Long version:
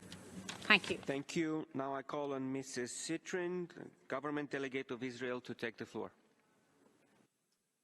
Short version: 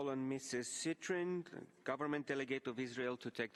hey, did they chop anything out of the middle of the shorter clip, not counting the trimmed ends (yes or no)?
no